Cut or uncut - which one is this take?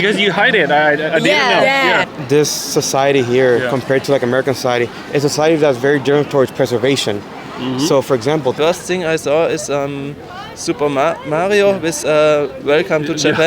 cut